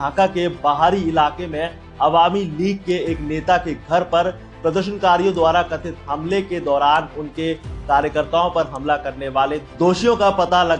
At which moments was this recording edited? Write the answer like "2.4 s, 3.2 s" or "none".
none